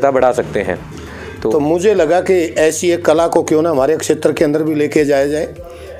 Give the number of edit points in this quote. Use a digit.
1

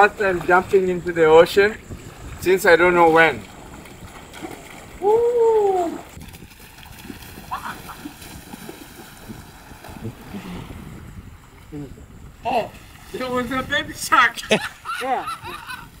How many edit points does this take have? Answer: 1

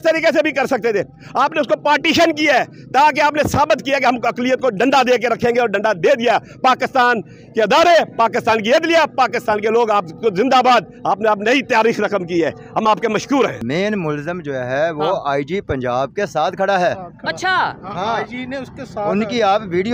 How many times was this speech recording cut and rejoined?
1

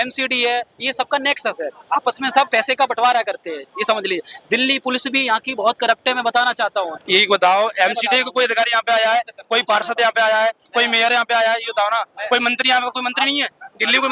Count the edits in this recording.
2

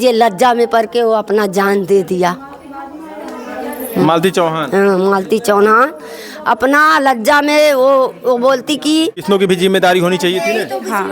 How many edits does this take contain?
1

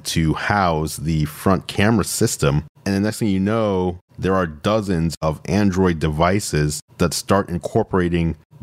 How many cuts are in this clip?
2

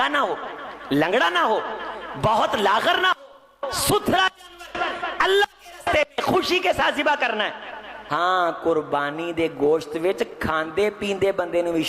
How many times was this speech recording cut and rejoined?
1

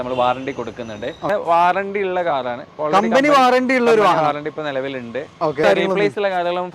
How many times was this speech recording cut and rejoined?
2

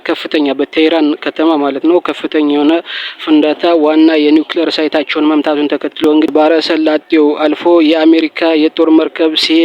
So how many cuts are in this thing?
1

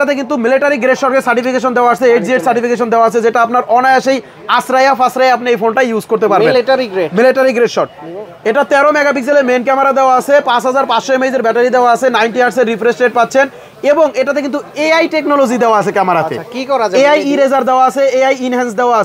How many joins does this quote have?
0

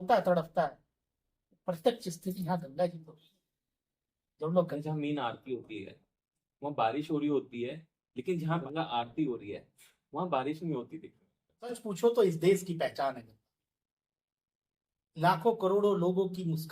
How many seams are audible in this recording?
3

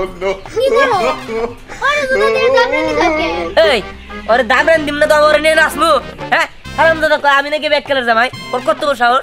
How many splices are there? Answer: 0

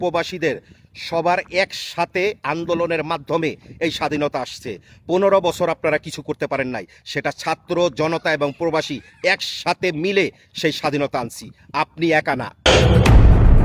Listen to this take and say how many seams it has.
1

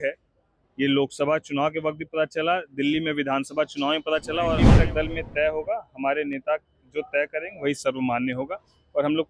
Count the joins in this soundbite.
1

